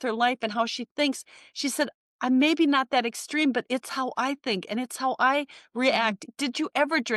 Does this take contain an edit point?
yes; 1 cut; at 6.2 s

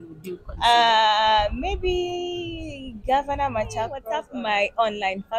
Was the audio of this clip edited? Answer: yes; 1 cut; at 4.0 s

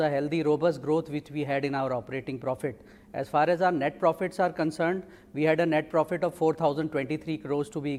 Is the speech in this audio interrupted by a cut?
no; 0 cuts

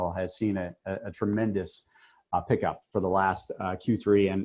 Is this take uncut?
yes; 0 cuts

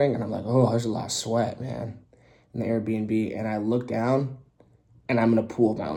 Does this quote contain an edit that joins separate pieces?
no; 0 cuts

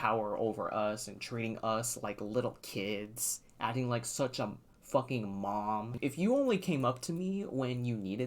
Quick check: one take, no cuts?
no; 1 cut; at 5.9 s

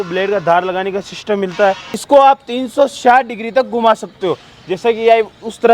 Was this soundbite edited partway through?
yes; 1 cut; at 1.9 s

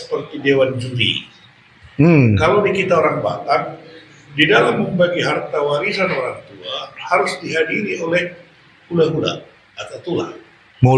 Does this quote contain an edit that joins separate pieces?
no; 0 cuts

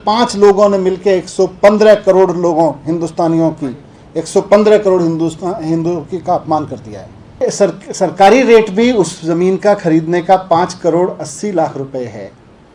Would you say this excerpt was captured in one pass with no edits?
no; 1 cut; at 7.4 s

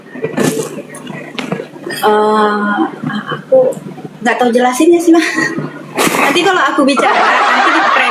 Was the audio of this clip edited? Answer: no; 0 cuts

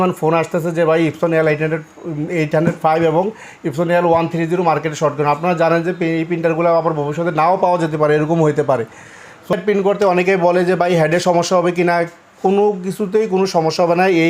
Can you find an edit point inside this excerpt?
yes; 1 cut; at 9.5 s

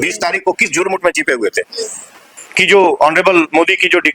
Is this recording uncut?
no; 1 cut; at 2.2 s

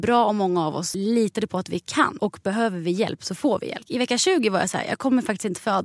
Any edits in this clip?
yes; 3 cuts; at 0.9 s, 2.1 s, 3.9 s

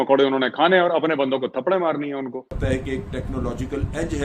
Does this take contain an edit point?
yes; 1 cut; at 2.6 s

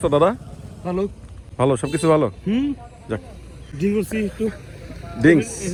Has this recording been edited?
no; 0 cuts

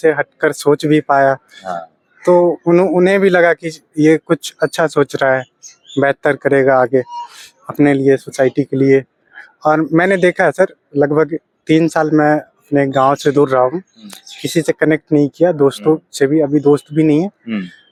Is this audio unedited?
yes; 0 cuts

